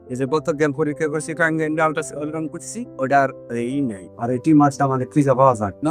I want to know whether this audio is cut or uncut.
uncut